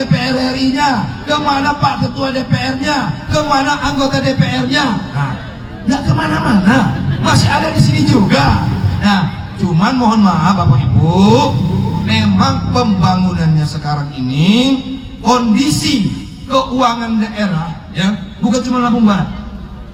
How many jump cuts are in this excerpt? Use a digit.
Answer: 0